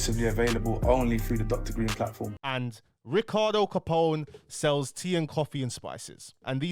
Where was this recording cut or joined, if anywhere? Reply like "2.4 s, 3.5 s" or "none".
2.4 s